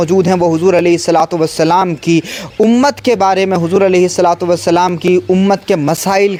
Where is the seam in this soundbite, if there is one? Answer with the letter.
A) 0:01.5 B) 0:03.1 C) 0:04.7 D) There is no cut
D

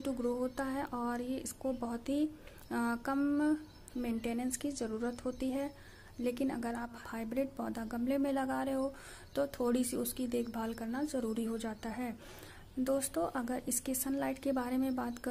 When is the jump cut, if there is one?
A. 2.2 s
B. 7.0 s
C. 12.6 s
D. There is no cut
B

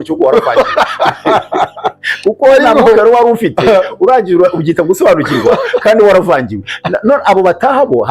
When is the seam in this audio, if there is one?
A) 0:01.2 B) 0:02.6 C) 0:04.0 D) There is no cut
D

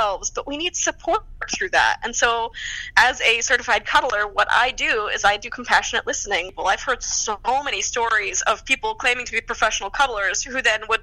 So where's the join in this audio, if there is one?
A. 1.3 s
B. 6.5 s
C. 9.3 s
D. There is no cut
B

